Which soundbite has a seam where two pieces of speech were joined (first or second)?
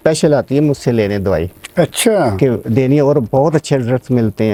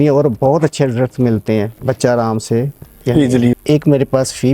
second